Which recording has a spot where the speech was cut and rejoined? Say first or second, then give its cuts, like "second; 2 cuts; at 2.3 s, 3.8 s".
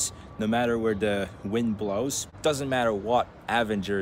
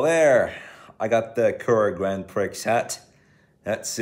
first; 1 cut; at 2.2 s